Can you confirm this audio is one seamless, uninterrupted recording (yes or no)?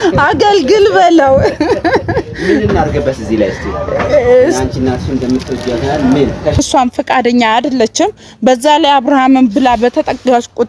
no